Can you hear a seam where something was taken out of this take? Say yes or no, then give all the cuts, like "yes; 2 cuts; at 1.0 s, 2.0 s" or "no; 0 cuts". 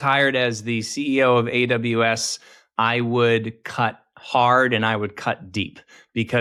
no; 0 cuts